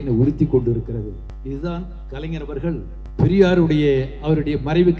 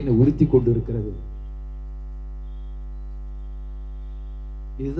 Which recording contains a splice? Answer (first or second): first